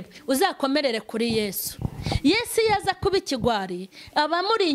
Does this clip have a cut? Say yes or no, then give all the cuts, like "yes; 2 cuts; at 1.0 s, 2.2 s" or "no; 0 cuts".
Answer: no; 0 cuts